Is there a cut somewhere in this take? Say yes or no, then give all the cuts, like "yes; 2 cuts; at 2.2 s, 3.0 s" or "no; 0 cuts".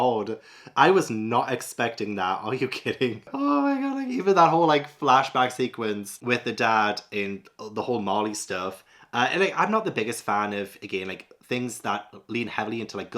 no; 0 cuts